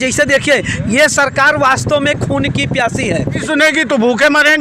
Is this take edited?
yes; 1 cut; at 3.4 s

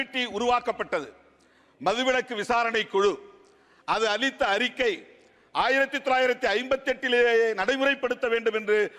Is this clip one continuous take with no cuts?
yes; 0 cuts

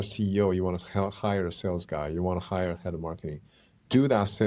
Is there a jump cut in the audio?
no; 0 cuts

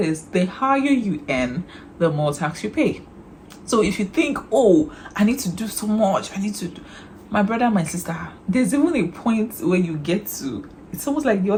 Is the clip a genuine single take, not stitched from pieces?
yes; 0 cuts

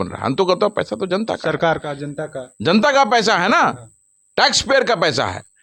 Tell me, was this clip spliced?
no; 0 cuts

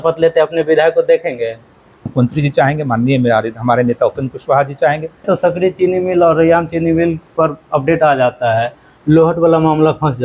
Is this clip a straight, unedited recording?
no; 2 cuts; at 2.1 s, 5.2 s

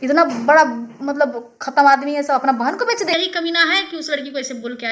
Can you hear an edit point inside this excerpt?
yes; 1 cut; at 3.1 s

